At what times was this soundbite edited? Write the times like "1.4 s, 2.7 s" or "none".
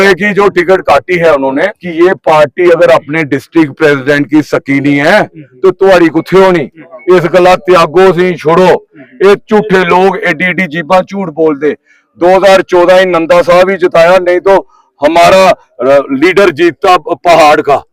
1.8 s